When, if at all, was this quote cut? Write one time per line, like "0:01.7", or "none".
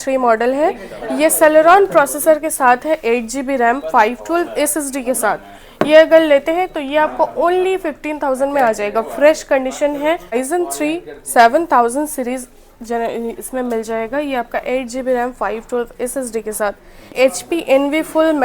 0:10.4
0:17.1

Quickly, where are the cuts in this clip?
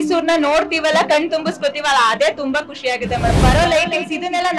0:03.4

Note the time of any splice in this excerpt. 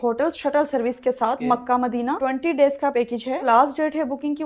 none

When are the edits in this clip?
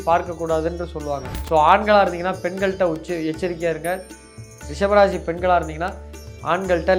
0:01.3

